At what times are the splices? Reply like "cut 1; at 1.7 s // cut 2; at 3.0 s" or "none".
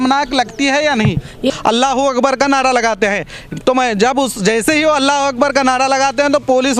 cut 1; at 1.5 s